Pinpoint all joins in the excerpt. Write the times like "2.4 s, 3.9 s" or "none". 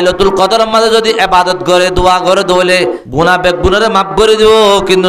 3.0 s